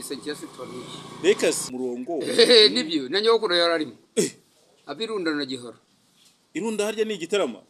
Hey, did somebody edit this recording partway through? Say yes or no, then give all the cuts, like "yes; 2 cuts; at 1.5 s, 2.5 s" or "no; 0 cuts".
yes; 1 cut; at 1.7 s